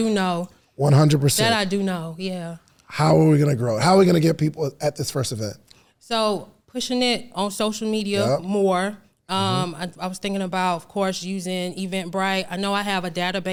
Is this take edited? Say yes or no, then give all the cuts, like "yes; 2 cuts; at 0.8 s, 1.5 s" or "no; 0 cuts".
no; 0 cuts